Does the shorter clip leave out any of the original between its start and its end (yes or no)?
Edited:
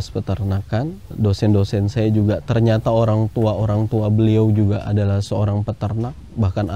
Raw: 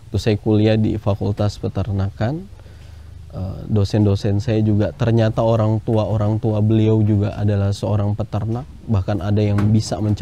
yes